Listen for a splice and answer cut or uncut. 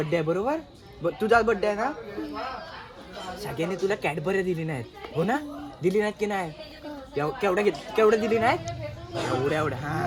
uncut